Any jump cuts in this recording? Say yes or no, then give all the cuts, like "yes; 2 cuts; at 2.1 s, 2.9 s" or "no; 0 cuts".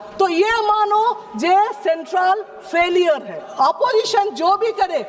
yes; 1 cut; at 3.4 s